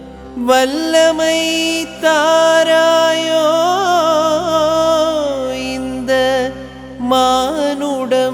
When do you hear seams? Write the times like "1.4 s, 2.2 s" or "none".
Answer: none